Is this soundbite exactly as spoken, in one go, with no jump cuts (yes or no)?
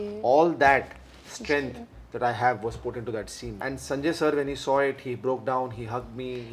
no